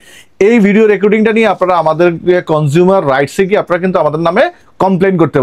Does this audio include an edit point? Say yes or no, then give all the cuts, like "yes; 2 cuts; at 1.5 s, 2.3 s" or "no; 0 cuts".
no; 0 cuts